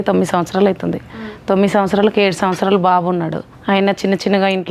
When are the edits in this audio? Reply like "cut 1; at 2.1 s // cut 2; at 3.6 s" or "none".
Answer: cut 1; at 3.5 s